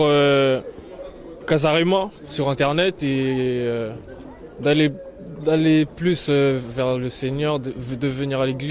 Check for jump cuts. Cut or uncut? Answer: uncut